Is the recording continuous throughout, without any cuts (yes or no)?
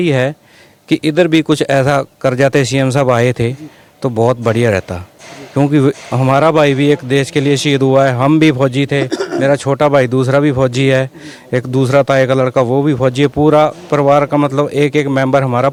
yes